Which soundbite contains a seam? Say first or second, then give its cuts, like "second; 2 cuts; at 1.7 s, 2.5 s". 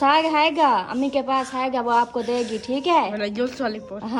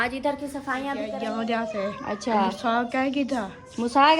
second; 1 cut; at 1.1 s